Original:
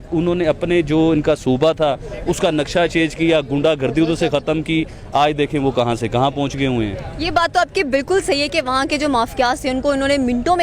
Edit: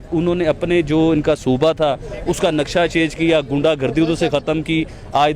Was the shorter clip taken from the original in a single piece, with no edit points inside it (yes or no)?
yes